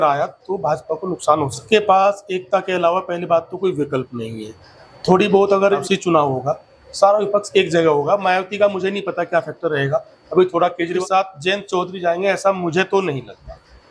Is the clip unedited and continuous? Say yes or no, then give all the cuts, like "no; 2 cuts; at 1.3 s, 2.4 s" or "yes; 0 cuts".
no; 3 cuts; at 1.6 s, 5.8 s, 11.0 s